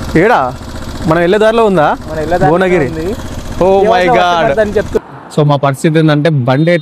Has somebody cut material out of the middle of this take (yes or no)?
yes